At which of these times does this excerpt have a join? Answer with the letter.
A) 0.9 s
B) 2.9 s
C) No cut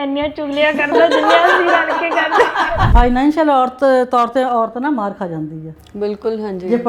B